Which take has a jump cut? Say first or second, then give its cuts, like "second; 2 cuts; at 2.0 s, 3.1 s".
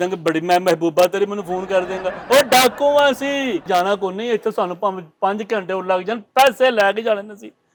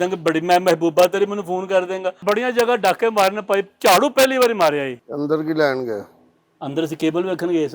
second; 2 cuts; at 2.2 s, 5.0 s